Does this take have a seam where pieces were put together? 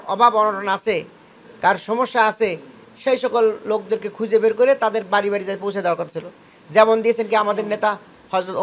no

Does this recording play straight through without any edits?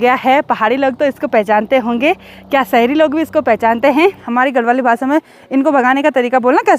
no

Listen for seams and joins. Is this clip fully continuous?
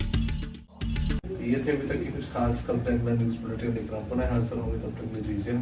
yes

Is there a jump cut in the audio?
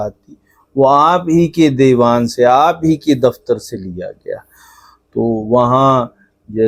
no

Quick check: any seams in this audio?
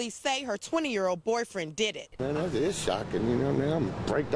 no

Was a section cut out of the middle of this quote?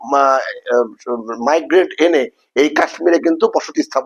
no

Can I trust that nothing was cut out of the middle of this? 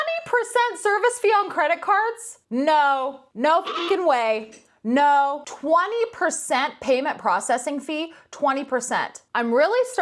no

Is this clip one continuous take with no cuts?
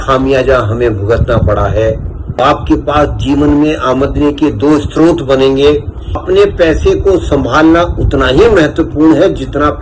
no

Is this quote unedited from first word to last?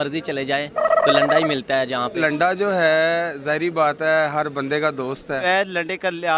no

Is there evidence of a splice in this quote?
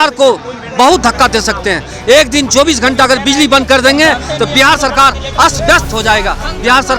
no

